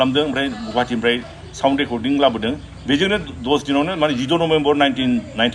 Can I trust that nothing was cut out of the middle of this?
yes; 0 cuts

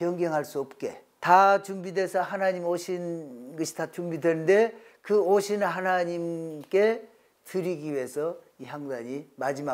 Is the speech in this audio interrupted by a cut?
yes; 1 cut; at 1.1 s

